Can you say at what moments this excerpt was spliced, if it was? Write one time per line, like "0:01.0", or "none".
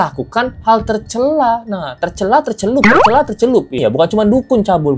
0:03.8